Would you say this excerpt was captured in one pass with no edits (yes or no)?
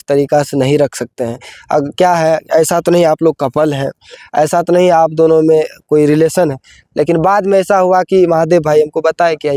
yes